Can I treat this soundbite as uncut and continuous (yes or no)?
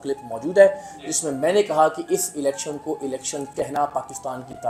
yes